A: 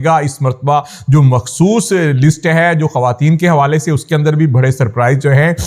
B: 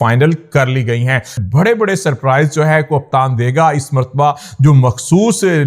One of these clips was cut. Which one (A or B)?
B